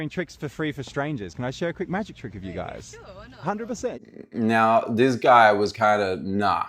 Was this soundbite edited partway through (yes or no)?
no